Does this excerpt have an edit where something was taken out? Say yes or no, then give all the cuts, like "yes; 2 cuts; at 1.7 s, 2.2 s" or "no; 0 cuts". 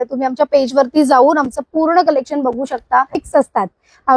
yes; 1 cut; at 3.2 s